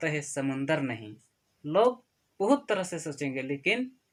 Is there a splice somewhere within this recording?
no; 0 cuts

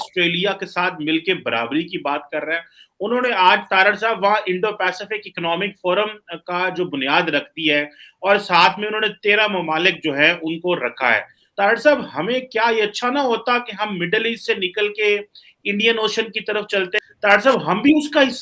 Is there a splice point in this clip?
yes; 2 cuts; at 11.4 s, 16.9 s

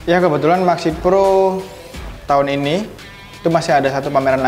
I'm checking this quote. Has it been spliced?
no; 0 cuts

